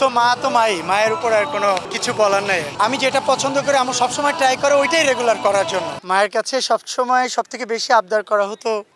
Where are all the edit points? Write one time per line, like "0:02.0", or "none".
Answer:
0:02.7
0:05.9